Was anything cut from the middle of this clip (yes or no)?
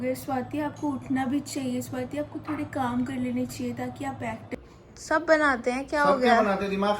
yes